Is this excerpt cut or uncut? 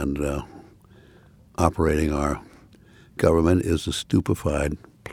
uncut